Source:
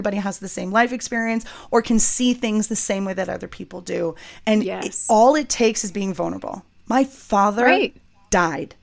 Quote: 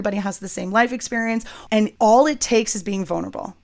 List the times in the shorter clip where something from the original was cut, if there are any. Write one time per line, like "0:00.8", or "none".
0:01.7